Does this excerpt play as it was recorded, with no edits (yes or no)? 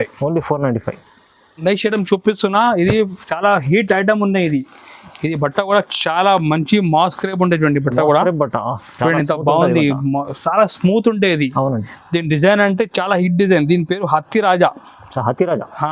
yes